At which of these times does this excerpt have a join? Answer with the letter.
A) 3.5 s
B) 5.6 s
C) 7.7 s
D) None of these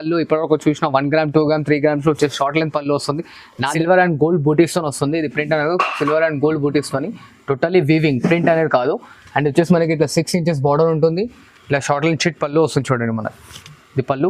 A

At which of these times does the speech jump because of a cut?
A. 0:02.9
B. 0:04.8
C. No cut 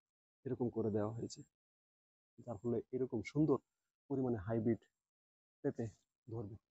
C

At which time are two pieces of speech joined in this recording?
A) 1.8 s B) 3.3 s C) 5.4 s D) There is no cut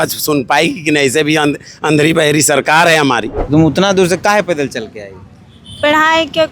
B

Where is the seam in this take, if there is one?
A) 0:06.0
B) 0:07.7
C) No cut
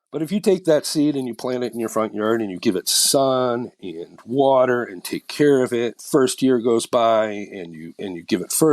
A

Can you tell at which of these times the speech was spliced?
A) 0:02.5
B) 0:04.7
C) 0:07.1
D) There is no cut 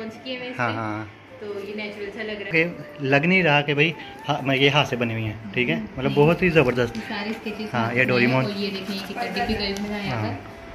A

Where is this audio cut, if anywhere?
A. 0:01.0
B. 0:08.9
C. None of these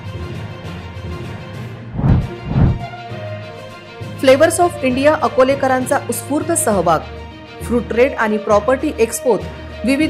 A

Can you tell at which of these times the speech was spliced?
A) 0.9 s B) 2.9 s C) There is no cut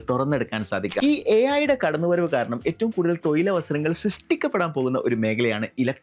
A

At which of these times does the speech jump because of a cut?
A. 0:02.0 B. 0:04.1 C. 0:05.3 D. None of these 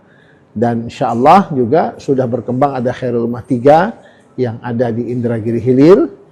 D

